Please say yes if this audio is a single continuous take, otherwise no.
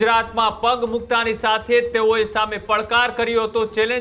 yes